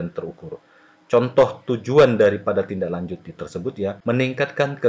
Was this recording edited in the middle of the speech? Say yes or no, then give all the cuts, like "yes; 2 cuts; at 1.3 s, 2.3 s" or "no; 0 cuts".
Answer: yes; 1 cut; at 4.0 s